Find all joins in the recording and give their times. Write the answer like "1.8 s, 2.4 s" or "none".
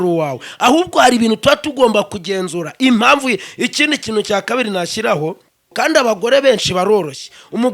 5.6 s